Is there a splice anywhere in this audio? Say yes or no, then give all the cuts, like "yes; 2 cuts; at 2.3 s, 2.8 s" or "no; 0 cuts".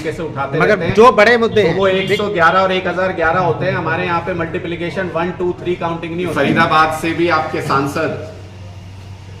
yes; 1 cut; at 6.3 s